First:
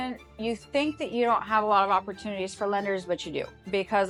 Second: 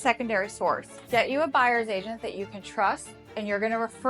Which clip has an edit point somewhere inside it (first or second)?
second